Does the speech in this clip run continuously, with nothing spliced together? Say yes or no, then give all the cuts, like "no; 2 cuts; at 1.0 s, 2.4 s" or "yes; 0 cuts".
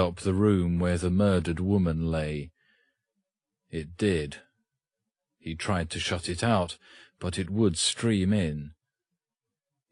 no; 1 cut; at 5.6 s